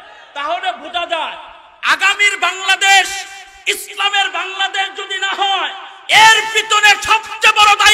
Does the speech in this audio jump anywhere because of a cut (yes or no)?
no